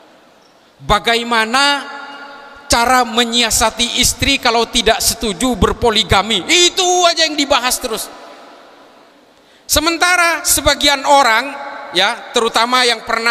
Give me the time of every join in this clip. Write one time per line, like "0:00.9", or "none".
0:09.1